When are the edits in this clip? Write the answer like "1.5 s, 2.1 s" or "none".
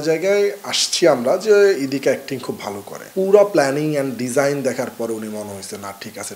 2.9 s